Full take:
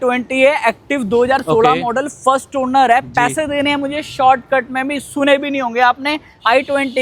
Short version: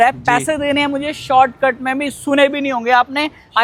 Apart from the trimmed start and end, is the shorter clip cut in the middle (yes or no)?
no